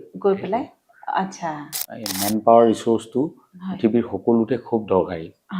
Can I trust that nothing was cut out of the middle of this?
no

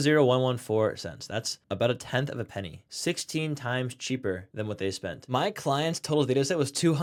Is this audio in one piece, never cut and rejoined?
yes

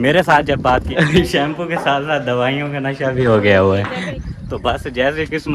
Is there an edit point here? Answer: yes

